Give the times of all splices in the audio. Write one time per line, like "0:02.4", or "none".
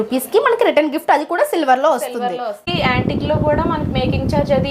0:02.6